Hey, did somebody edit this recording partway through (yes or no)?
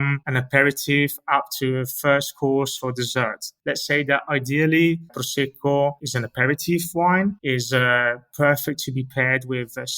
yes